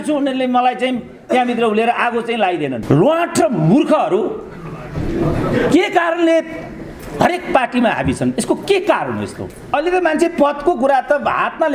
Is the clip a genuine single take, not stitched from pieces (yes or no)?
no